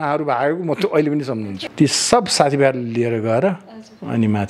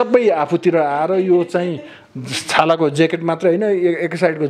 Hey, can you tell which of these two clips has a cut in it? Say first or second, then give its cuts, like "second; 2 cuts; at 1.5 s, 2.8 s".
first; 1 cut; at 1.6 s